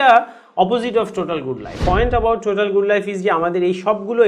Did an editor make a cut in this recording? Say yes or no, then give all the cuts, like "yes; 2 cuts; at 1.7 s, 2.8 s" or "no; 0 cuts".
yes; 1 cut; at 1.7 s